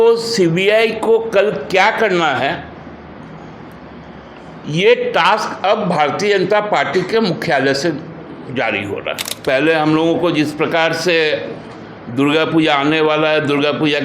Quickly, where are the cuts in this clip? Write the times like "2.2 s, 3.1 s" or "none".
9.3 s